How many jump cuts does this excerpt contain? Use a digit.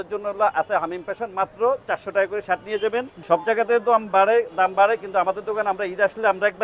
1